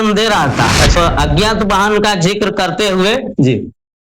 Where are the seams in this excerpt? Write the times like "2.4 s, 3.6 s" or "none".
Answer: 1.0 s